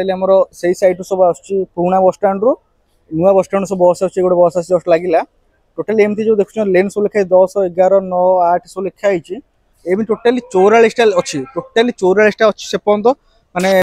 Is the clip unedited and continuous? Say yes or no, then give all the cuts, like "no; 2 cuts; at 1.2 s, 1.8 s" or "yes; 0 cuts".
yes; 0 cuts